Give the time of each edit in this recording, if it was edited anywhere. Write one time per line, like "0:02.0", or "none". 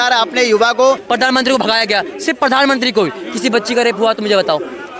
0:01.0